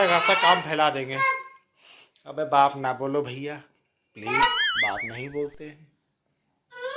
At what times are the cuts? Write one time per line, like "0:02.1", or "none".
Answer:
none